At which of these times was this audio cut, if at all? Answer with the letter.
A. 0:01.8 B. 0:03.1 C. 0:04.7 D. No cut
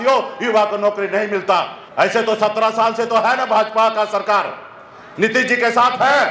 A